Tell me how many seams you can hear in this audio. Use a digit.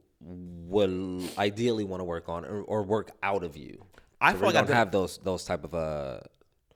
0